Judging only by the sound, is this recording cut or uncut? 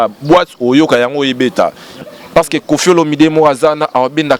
cut